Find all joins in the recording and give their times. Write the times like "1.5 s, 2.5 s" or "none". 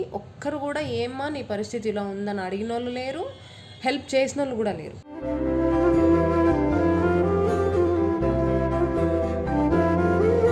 none